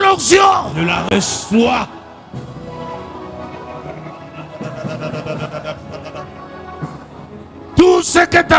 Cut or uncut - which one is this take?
uncut